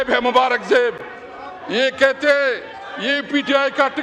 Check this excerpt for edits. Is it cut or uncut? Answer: uncut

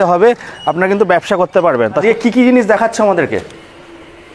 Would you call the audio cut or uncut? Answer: cut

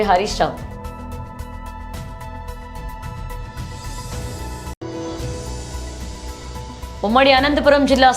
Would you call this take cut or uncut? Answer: uncut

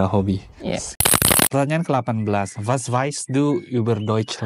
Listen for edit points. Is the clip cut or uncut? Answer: cut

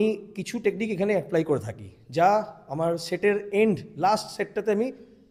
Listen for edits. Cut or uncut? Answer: uncut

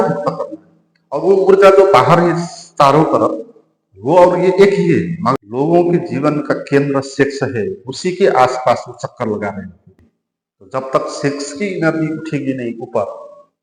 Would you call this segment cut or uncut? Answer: cut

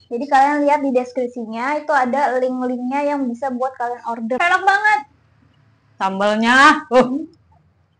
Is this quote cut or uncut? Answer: cut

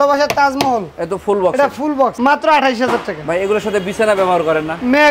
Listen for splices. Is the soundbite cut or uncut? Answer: uncut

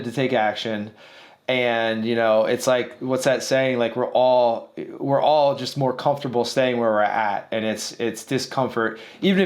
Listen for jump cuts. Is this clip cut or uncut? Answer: uncut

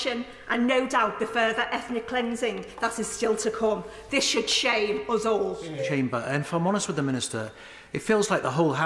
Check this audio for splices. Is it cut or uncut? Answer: cut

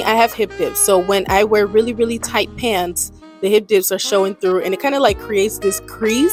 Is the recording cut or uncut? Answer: uncut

